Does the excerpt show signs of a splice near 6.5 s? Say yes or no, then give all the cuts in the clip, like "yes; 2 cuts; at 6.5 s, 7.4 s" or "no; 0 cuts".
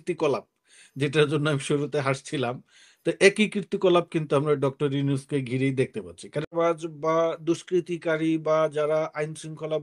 yes; 1 cut; at 6.5 s